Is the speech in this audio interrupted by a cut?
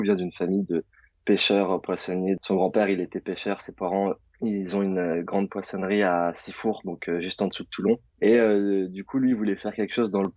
yes; 3 cuts; at 2.4 s, 4.3 s, 8.1 s

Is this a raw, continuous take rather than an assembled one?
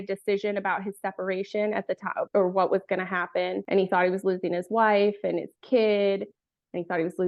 yes; 0 cuts

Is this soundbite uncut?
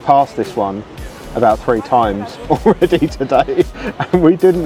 yes; 0 cuts

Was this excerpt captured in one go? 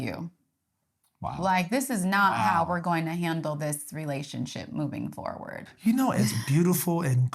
no; 1 cut; at 5.6 s

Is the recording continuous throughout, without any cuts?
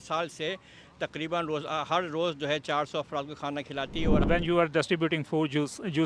no; 1 cut; at 4.2 s

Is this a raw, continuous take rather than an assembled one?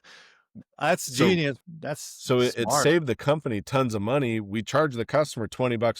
no; 1 cut; at 1.6 s

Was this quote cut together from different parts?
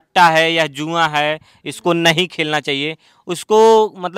no; 0 cuts

